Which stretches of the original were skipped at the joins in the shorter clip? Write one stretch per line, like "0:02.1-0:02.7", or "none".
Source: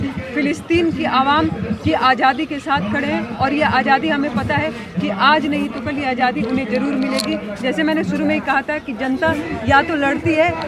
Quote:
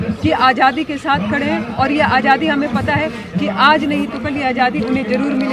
none